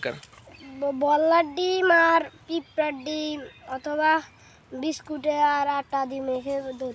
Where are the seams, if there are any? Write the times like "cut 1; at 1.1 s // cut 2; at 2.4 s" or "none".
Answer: none